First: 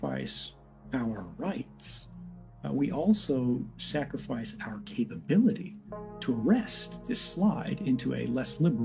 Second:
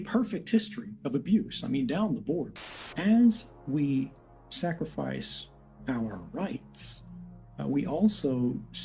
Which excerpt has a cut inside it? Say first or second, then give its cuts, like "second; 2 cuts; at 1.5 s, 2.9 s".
second; 1 cut; at 2.5 s